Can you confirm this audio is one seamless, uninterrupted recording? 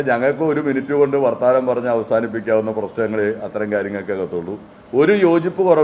yes; 0 cuts

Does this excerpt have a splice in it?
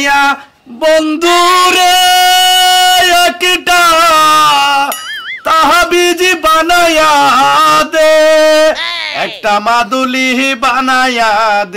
no; 0 cuts

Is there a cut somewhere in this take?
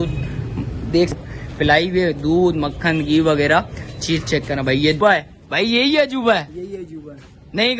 yes; 2 cuts; at 1.1 s, 5.0 s

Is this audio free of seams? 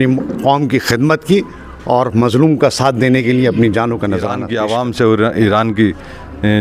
no; 1 cut; at 4.4 s

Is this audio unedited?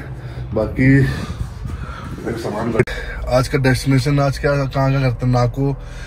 no; 1 cut; at 2.8 s

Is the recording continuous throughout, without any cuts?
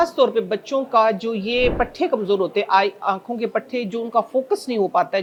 yes; 0 cuts

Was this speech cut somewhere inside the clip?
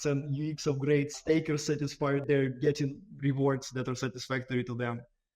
yes; 2 cuts; at 1.2 s, 2.2 s

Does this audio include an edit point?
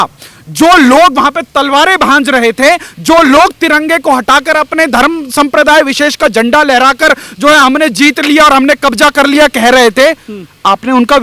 no; 0 cuts

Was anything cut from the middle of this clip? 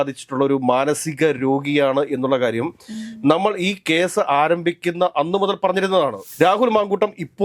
yes; 1 cut; at 6.2 s

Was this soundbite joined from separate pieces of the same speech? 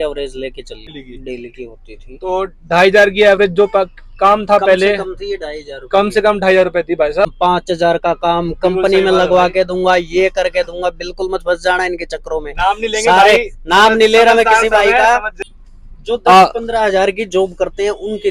yes; 3 cuts; at 0.9 s, 7.3 s, 15.3 s

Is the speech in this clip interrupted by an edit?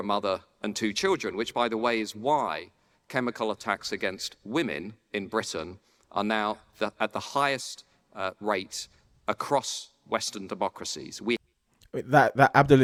no; 0 cuts

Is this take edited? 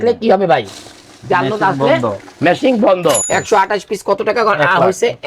yes; 1 cut; at 3.2 s

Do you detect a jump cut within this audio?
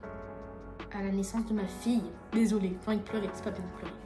no; 0 cuts

